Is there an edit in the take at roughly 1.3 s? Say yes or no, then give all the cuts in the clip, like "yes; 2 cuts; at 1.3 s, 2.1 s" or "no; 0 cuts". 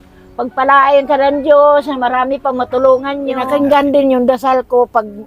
no; 1 cut; at 3.4 s